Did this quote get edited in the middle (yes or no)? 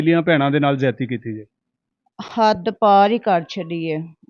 no